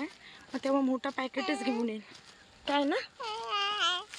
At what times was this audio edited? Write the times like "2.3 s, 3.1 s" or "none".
none